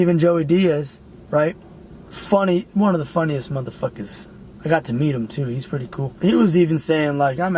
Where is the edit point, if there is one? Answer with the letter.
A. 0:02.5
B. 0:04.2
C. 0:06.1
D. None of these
C